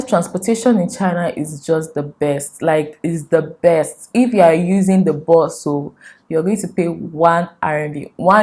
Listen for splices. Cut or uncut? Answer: uncut